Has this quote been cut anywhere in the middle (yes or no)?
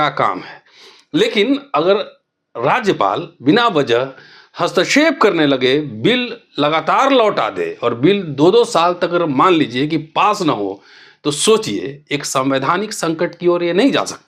no